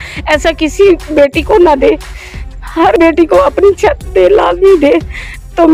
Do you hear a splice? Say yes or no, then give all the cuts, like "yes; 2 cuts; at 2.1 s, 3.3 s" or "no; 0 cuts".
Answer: no; 0 cuts